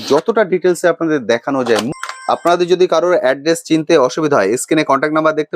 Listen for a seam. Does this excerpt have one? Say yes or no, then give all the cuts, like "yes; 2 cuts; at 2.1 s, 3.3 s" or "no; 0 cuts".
yes; 1 cut; at 2.0 s